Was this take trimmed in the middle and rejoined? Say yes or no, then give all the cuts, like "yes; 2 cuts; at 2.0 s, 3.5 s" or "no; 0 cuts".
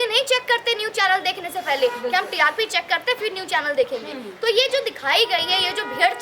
no; 0 cuts